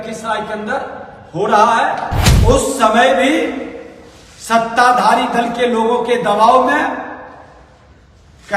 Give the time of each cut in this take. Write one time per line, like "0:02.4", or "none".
0:02.2